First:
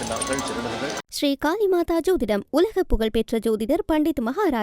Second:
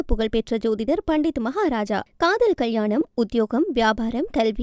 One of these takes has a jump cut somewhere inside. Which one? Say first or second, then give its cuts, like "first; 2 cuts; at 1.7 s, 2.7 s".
first; 1 cut; at 1.0 s